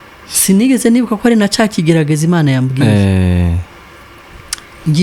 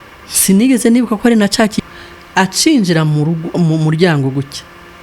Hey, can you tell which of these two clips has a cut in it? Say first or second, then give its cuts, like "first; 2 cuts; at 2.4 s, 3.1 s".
second; 1 cut; at 1.8 s